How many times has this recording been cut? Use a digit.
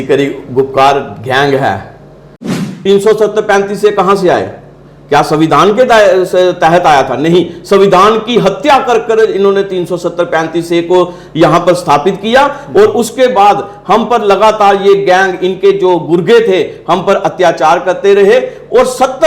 1